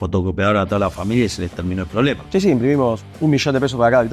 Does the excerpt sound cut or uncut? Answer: cut